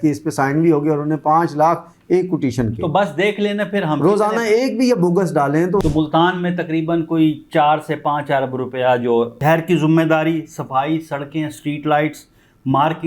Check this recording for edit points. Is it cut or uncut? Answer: cut